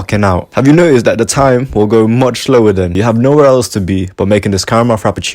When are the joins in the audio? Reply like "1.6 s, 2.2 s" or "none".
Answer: 2.9 s